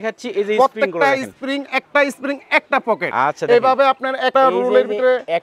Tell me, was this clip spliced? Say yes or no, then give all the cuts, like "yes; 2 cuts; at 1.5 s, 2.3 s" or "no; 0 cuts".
yes; 2 cuts; at 3.1 s, 4.3 s